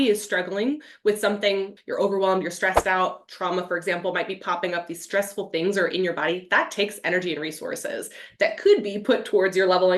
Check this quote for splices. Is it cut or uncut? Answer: cut